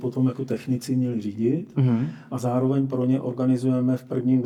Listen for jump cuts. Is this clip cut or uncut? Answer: uncut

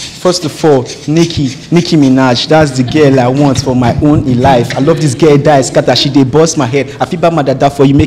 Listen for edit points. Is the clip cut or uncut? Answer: uncut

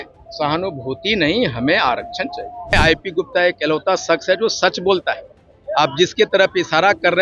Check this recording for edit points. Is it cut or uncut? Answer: cut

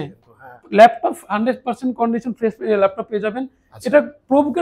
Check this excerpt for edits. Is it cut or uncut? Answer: uncut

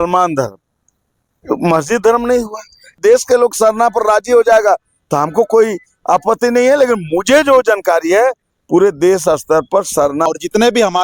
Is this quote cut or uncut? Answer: cut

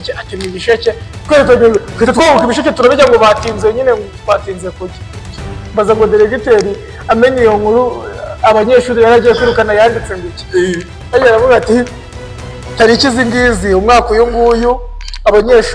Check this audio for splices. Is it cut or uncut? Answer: uncut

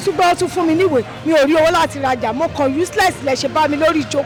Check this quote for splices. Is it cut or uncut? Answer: uncut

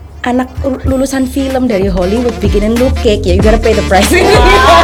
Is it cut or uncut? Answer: uncut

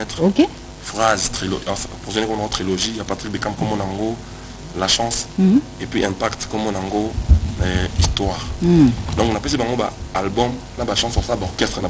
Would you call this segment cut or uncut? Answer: uncut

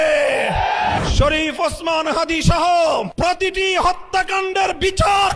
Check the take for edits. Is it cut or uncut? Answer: cut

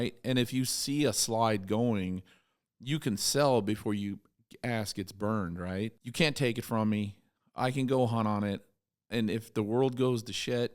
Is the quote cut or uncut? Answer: cut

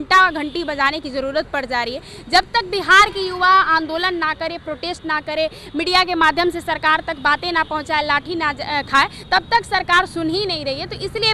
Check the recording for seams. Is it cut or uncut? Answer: uncut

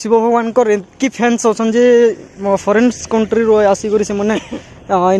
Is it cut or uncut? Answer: uncut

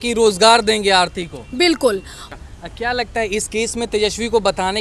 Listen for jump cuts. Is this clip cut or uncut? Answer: uncut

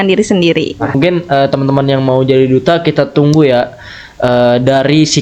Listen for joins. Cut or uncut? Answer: cut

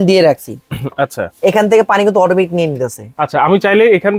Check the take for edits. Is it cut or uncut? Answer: uncut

